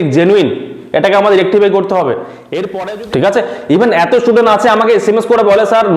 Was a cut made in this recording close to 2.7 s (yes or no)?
yes